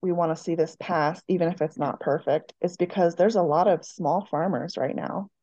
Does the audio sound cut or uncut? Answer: uncut